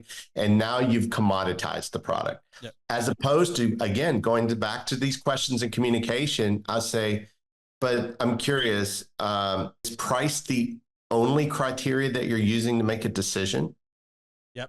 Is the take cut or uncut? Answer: cut